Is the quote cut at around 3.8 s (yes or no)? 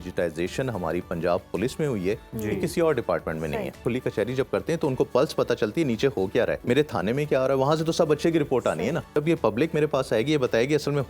yes